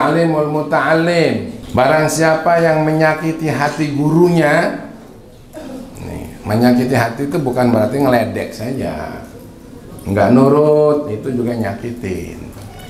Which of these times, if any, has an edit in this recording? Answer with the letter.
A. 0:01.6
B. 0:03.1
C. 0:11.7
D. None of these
A